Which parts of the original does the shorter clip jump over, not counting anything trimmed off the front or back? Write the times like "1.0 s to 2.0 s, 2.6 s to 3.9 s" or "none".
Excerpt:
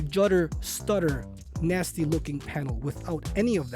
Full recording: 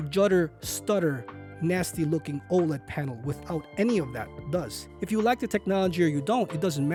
2.4 s to 2.8 s